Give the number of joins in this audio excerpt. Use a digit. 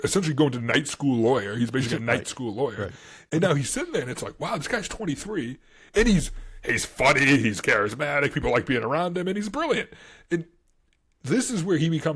1